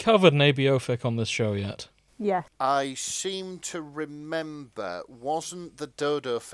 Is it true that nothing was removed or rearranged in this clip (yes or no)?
yes